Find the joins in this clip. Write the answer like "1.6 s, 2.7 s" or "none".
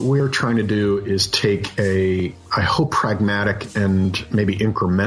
2.4 s